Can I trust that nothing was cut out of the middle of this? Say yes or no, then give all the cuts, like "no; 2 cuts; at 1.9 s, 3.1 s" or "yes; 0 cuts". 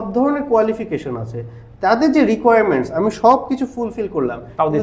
yes; 0 cuts